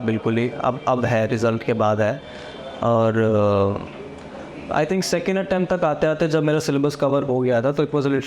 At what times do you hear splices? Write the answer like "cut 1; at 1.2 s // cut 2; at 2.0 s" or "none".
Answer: none